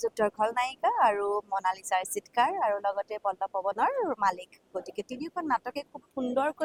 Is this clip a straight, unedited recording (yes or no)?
yes